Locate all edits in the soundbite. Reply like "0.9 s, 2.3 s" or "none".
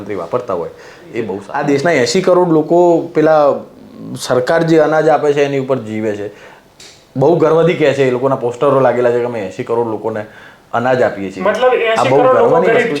1.4 s